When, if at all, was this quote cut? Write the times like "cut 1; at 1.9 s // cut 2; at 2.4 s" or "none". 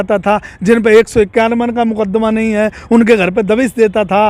none